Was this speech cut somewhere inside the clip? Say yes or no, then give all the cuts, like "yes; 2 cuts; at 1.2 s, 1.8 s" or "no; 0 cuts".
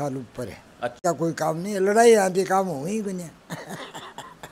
yes; 1 cut; at 1.0 s